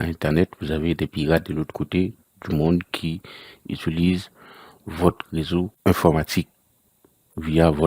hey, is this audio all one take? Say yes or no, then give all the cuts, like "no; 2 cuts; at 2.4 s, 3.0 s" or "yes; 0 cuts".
no; 1 cut; at 5.7 s